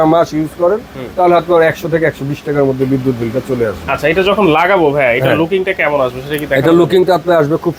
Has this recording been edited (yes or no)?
no